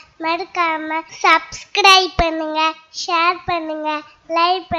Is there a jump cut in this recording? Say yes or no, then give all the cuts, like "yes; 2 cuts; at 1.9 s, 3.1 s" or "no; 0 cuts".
yes; 1 cut; at 1.1 s